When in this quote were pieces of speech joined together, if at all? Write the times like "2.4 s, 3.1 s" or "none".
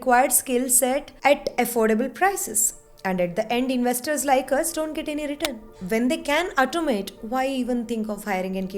5.6 s